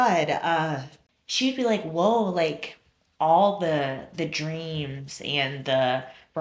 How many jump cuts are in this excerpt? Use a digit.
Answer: 0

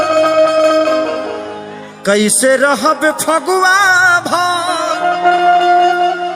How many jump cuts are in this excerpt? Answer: 0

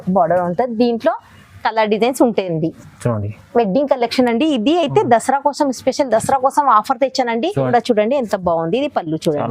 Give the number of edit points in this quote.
1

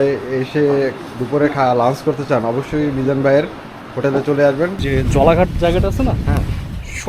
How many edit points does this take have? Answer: 1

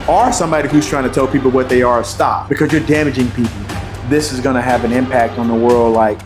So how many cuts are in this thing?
2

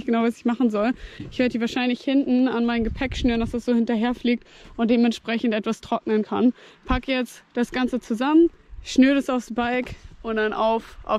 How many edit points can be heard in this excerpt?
0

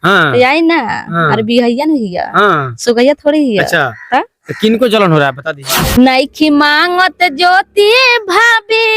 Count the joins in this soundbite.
1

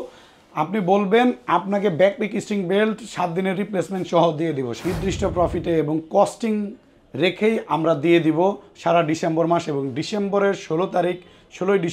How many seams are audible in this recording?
1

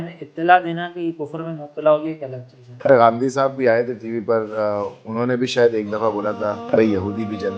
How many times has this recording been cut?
2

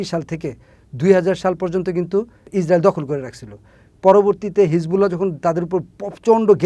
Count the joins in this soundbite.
0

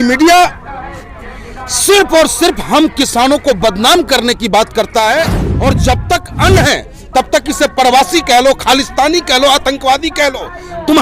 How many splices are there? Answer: 1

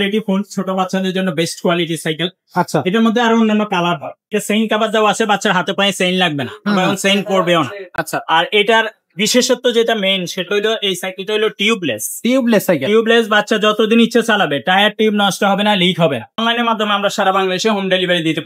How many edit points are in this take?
2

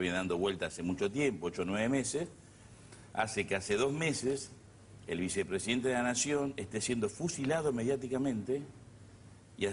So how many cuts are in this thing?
0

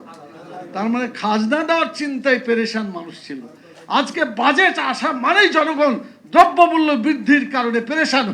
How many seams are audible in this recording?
0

